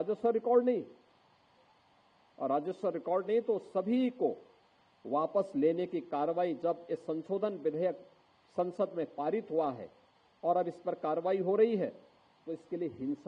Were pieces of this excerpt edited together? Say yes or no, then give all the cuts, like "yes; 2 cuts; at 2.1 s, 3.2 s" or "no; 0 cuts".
no; 0 cuts